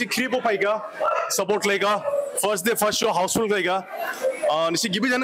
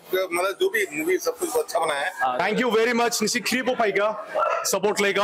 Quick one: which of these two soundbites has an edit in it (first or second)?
second